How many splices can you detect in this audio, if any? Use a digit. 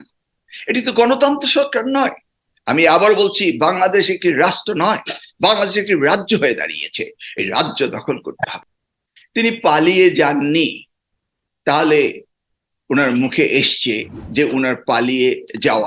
1